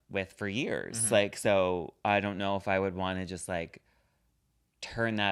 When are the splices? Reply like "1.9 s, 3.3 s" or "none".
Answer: none

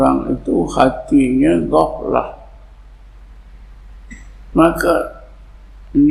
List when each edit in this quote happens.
none

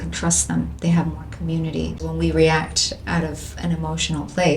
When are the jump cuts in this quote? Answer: 2.1 s

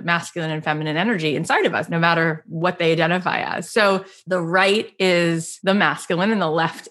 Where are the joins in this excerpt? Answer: 1.8 s, 4.1 s, 5.5 s

